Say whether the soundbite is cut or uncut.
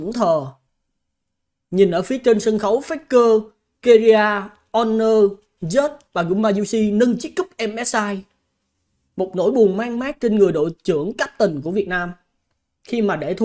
uncut